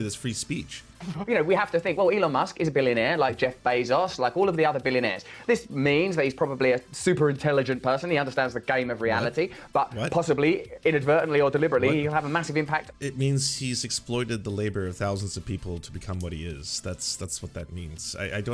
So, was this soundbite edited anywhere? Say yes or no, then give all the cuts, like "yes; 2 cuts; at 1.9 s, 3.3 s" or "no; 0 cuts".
yes; 1 cut; at 1.1 s